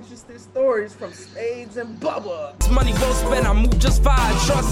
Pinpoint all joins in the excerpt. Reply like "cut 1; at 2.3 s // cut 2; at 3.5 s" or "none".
cut 1; at 2.7 s